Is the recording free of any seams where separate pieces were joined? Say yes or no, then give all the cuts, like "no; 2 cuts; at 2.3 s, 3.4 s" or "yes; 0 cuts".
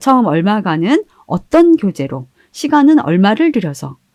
yes; 0 cuts